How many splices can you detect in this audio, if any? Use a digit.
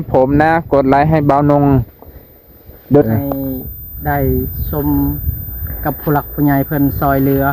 1